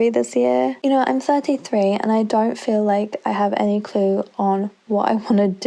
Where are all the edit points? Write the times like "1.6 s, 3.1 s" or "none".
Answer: none